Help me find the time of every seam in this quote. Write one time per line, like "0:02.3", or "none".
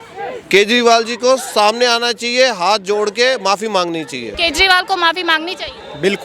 0:04.2